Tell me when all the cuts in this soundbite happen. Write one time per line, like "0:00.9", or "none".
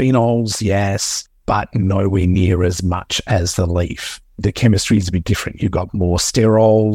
0:04.4